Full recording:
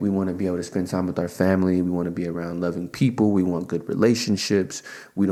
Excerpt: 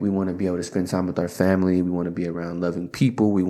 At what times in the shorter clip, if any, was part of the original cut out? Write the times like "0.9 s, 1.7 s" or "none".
none

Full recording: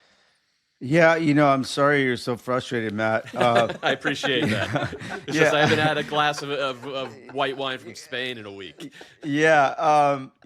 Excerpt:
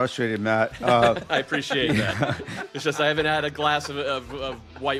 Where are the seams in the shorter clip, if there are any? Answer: none

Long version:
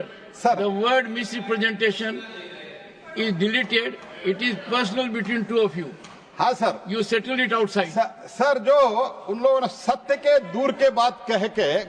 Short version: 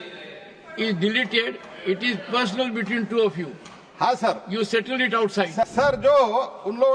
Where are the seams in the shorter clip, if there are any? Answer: 5.7 s

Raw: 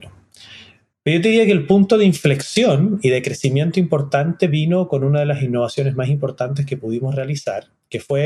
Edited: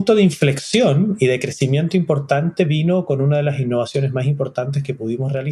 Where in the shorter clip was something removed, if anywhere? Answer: none

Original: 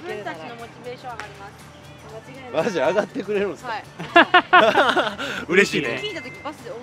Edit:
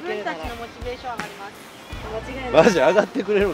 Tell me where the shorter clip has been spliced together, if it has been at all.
none

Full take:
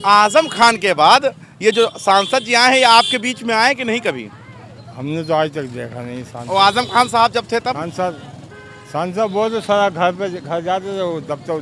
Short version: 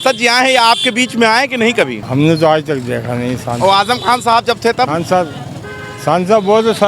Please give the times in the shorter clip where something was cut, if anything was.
2.0 s

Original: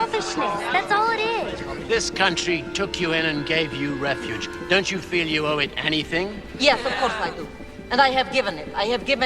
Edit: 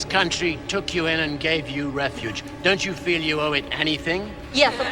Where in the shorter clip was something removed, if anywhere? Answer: none

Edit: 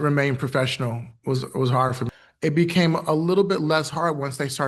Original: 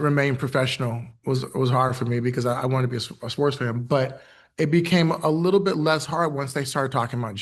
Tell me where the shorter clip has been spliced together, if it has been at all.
2.0 s

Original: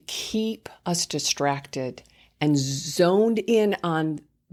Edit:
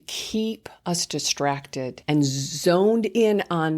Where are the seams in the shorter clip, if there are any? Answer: 2.0 s

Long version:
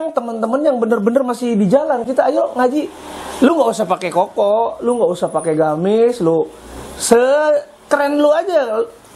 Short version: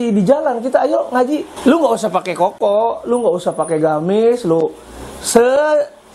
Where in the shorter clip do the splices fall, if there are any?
1.5 s

